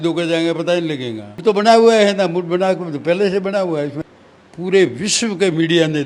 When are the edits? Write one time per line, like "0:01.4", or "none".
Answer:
0:01.3
0:04.0